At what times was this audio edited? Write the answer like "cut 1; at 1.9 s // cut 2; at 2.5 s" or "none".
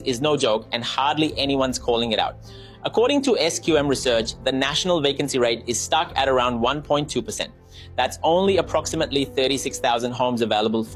none